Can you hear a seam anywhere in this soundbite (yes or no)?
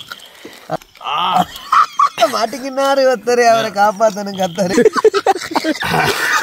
yes